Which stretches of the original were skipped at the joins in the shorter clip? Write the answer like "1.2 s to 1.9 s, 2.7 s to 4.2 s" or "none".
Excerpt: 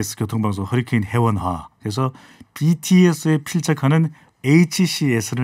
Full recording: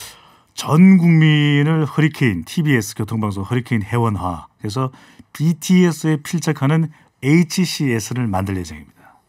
none